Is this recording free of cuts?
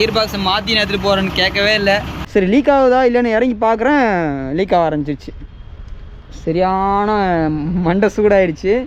no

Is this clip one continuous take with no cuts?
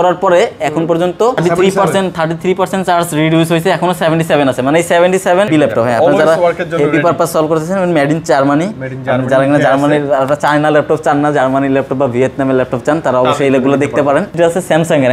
no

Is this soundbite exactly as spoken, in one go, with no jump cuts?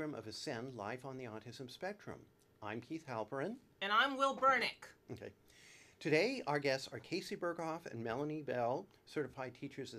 yes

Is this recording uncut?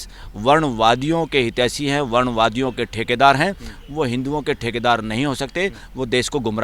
yes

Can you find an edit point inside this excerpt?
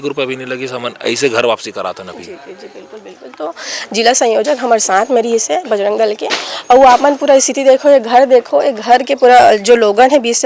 no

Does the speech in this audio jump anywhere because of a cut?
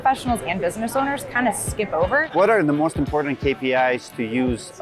yes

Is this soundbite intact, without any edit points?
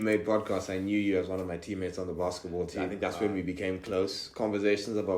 no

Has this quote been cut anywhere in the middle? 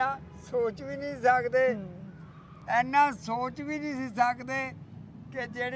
no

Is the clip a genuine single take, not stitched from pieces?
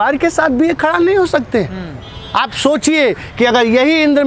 yes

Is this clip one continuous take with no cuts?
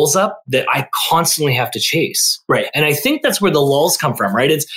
yes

